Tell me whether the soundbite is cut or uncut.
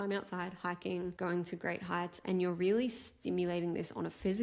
cut